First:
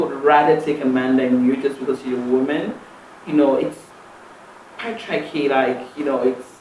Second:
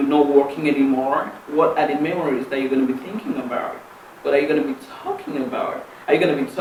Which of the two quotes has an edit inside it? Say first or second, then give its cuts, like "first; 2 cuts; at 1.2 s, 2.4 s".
first; 1 cut; at 3.9 s